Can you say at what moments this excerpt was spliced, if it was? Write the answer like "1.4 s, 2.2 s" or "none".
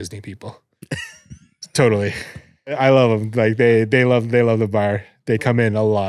2.8 s